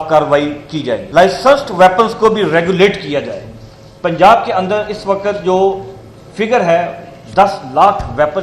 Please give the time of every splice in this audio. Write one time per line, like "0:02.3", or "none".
0:01.0